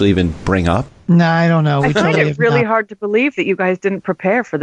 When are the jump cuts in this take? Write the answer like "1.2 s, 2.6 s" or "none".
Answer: 0.9 s